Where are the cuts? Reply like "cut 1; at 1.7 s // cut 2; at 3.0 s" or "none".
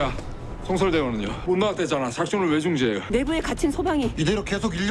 cut 1; at 1.4 s // cut 2; at 3.0 s